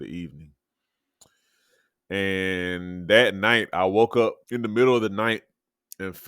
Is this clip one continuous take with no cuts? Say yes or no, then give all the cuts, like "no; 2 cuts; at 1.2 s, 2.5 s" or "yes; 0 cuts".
no; 1 cut; at 4.4 s